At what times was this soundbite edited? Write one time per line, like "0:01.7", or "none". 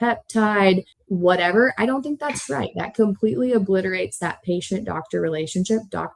0:00.9